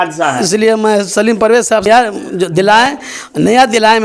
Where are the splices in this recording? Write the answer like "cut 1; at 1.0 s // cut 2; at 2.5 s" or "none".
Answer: cut 1; at 1.7 s